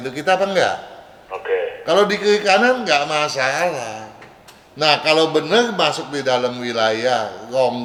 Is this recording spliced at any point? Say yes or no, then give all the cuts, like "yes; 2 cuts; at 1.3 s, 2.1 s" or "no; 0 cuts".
no; 0 cuts